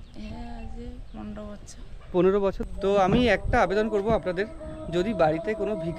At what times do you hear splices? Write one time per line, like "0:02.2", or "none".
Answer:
0:02.6

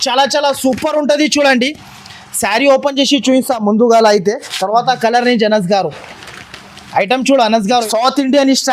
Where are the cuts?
0:07.8

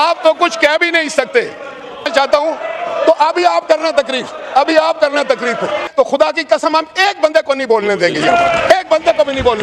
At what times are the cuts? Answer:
0:02.1
0:05.9

